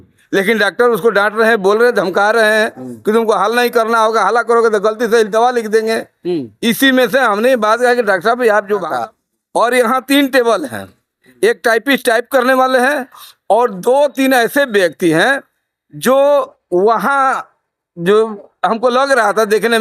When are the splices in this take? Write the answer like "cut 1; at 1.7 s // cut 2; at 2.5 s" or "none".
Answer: cut 1; at 8.9 s

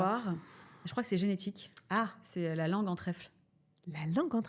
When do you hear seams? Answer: none

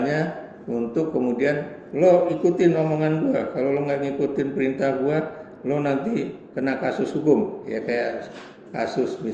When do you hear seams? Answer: none

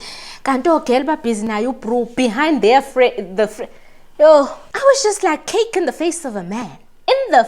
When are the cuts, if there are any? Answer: cut 1; at 4.6 s

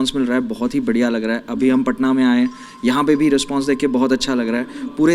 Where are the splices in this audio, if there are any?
none

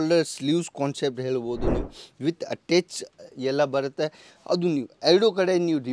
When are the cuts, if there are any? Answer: none

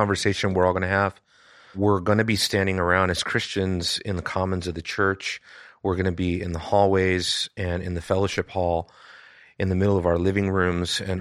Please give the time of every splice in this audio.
cut 1; at 1.8 s

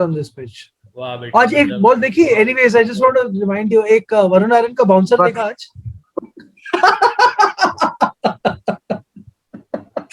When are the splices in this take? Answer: none

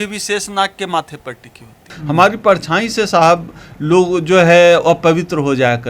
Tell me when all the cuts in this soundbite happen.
cut 1; at 1.9 s

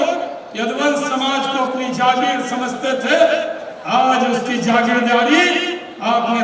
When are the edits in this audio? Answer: none

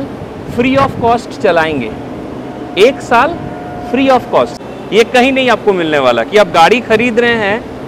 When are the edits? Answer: cut 1; at 4.5 s

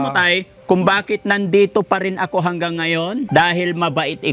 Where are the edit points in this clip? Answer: cut 1; at 3.3 s

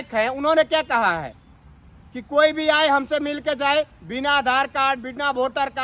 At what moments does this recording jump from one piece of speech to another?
none

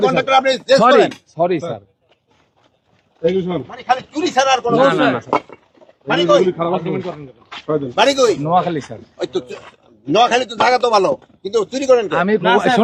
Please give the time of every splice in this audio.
none

